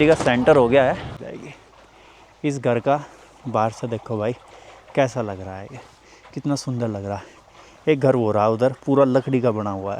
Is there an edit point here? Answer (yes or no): yes